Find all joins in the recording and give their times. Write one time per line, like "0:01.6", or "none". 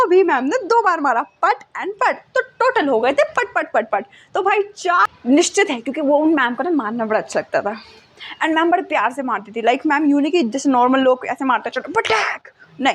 0:05.0